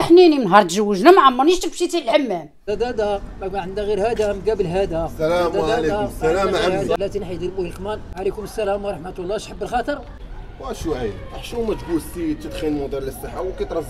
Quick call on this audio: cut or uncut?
cut